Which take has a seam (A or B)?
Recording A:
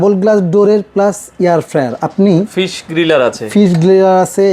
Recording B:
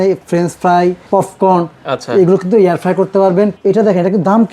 B